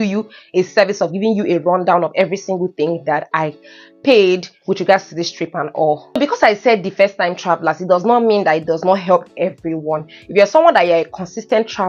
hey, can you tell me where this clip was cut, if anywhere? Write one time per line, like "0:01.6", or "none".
none